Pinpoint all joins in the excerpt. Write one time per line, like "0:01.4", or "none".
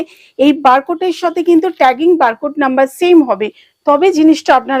none